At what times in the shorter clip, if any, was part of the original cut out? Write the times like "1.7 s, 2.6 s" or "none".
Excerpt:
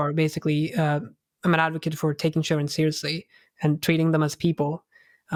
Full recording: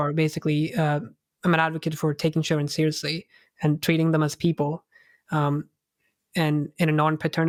none